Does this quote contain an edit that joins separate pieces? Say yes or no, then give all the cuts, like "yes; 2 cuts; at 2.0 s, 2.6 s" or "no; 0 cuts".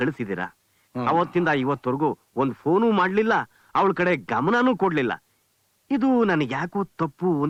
no; 0 cuts